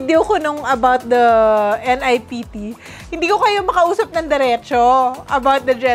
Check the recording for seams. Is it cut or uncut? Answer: uncut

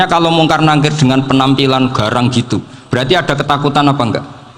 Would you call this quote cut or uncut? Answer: uncut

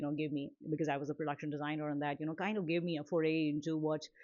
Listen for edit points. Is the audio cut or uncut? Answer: uncut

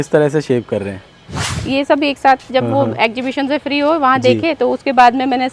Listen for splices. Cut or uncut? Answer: cut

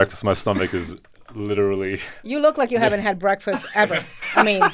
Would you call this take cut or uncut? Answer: uncut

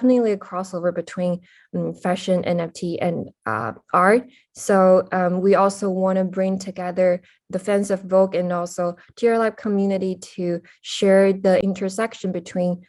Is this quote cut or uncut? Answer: uncut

